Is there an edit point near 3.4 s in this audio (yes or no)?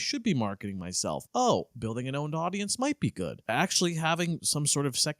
yes